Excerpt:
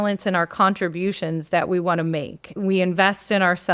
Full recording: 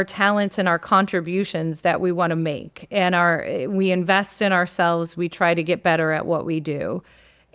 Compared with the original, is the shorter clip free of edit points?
no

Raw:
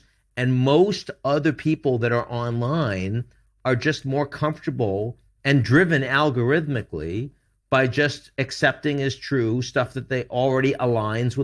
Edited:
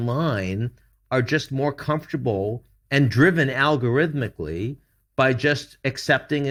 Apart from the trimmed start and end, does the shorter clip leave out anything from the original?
no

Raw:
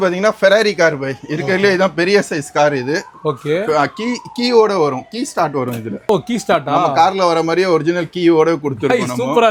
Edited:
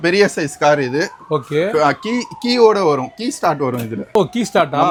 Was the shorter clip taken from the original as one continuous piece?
yes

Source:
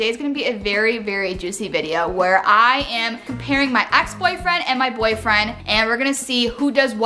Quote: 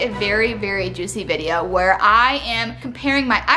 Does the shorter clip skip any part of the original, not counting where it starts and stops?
no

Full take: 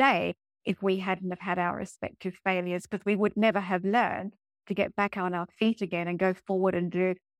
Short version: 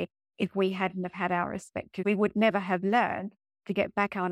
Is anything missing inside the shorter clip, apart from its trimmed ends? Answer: yes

